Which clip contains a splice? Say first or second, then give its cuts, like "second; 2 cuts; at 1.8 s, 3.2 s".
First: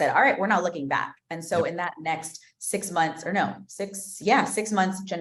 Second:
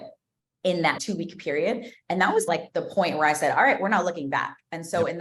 second; 2 cuts; at 1.0 s, 2.5 s